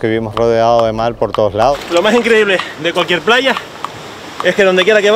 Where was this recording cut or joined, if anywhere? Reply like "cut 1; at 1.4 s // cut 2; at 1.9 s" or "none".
cut 1; at 1.7 s